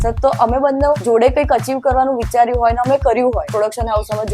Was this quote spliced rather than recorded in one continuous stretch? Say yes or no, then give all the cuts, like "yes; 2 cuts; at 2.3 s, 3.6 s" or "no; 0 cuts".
yes; 2 cuts; at 1.0 s, 3.5 s